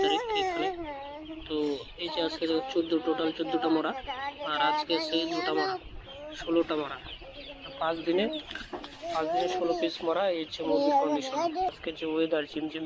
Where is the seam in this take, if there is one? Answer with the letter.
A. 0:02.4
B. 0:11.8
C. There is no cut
B